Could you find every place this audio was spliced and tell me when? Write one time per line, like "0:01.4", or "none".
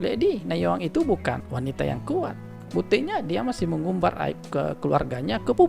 0:01.4
0:02.5